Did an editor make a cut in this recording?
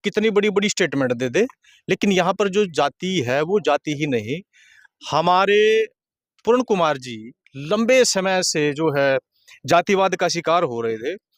no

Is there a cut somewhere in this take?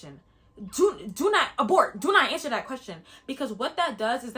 no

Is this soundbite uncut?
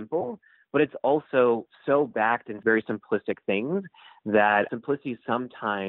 no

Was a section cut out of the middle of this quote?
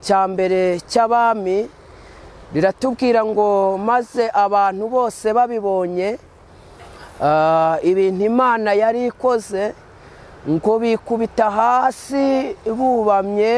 no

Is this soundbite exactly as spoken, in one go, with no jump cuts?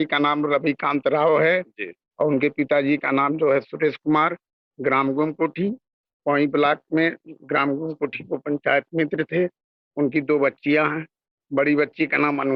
yes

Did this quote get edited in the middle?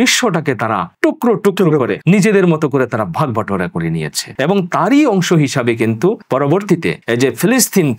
yes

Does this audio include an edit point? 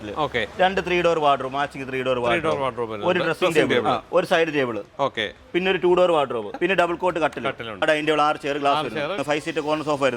yes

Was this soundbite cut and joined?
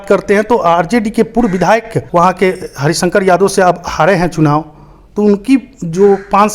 yes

